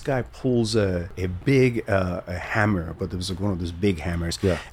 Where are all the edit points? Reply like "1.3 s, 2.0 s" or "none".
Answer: 1.2 s